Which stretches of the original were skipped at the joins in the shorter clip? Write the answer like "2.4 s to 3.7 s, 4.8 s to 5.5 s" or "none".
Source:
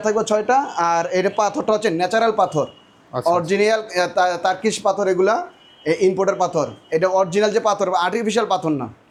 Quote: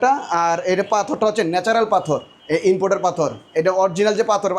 2.8 s to 5.7 s